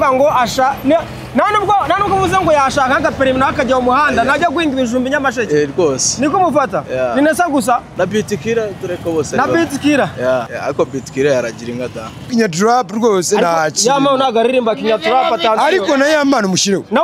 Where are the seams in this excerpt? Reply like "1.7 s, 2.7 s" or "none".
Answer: 7.9 s, 10.5 s, 12.3 s